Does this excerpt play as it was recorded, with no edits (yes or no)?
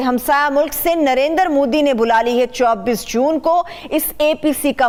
yes